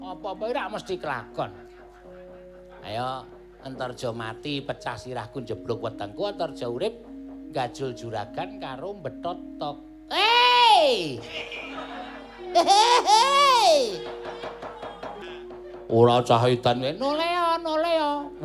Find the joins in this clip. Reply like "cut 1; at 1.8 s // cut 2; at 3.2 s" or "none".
cut 1; at 15.2 s